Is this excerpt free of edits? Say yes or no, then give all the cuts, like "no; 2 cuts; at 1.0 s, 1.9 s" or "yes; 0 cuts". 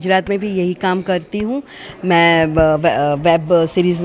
yes; 0 cuts